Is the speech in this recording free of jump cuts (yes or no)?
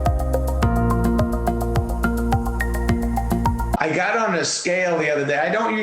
no